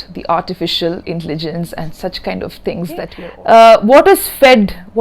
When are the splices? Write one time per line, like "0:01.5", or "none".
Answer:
0:03.2